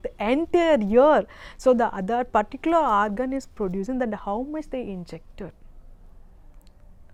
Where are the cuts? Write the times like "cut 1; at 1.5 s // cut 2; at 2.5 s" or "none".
none